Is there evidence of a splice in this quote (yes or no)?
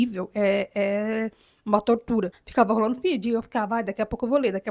yes